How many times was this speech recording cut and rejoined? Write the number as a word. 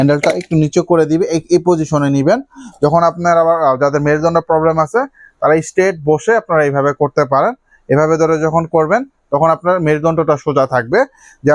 zero